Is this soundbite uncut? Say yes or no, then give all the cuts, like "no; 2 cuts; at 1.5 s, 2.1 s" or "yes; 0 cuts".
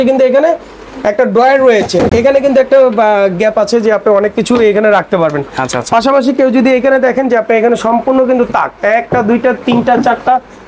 yes; 0 cuts